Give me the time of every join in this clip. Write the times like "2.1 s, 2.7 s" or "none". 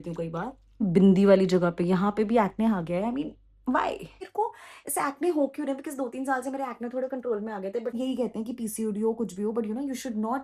0.8 s, 4.2 s, 7.9 s

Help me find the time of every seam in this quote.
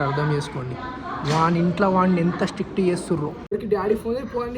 3.5 s

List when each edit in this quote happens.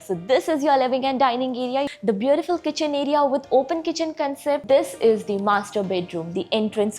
1.9 s, 4.6 s

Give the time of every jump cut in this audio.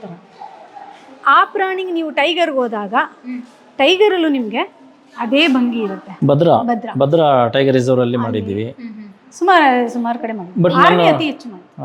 6.1 s

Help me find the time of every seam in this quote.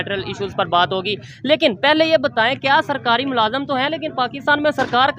none

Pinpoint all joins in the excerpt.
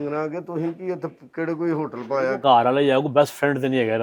2.4 s

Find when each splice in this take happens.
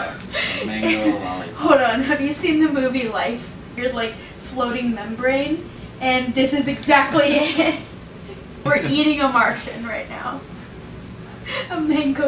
3.8 s, 8.6 s

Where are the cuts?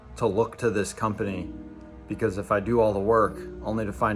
none

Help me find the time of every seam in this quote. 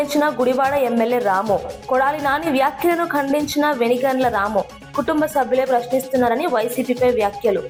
none

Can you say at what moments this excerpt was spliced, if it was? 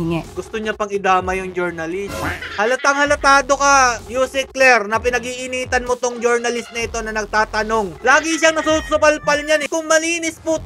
7.9 s, 9.7 s

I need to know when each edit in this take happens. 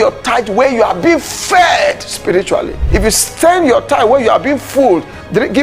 2.8 s

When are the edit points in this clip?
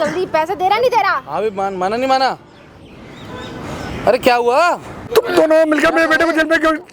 none

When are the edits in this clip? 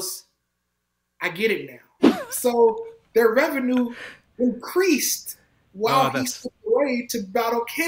2.2 s

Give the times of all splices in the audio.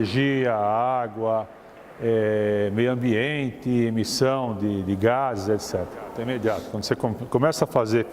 6.2 s

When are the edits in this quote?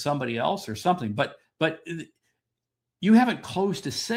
none

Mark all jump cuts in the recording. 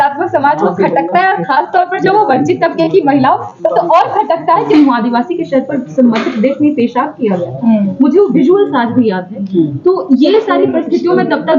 4.7 s

